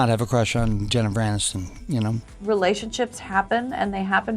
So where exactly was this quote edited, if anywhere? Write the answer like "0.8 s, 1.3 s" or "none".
2.3 s